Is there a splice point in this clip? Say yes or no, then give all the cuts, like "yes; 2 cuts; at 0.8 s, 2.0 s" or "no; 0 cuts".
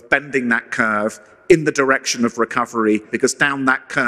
yes; 1 cut; at 3.1 s